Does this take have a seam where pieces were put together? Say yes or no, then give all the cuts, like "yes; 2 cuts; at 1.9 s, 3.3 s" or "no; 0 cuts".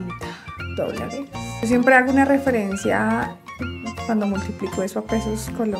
no; 0 cuts